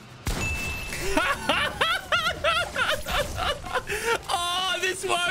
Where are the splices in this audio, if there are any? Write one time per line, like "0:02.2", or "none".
none